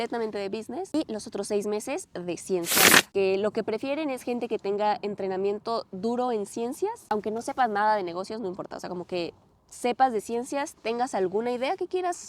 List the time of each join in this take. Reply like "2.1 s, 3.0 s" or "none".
0.9 s, 3.1 s, 7.1 s